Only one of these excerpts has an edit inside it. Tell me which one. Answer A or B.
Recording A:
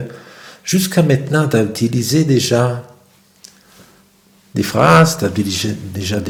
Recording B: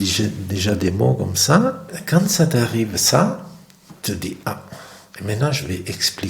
B